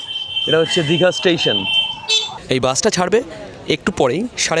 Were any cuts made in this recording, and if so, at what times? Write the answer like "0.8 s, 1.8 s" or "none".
2.4 s